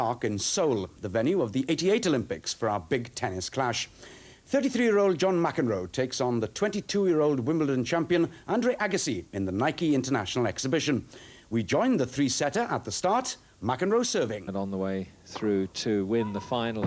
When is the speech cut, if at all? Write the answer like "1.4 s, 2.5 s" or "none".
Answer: none